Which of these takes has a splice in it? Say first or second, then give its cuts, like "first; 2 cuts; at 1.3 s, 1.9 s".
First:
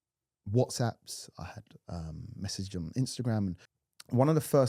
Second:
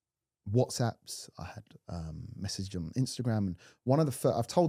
first; 1 cut; at 3.7 s